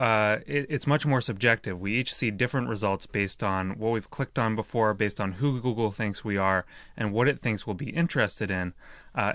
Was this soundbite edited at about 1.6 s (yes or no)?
yes